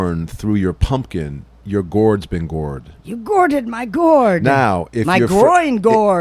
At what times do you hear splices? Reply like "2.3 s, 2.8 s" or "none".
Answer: 2.9 s